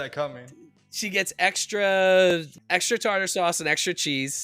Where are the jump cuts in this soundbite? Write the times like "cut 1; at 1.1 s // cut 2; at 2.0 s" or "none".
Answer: cut 1; at 2.5 s